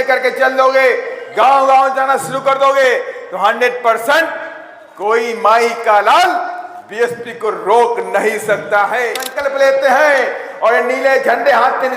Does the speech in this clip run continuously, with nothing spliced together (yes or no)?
no